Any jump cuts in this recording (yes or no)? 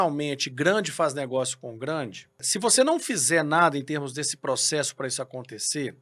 yes